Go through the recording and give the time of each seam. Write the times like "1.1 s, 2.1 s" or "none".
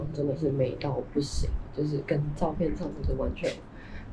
none